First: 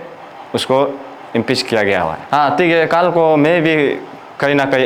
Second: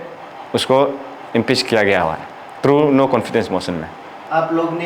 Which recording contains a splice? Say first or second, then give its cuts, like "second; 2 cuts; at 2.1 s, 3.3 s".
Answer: first; 1 cut; at 2.2 s